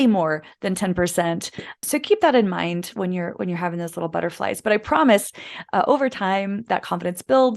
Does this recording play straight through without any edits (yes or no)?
no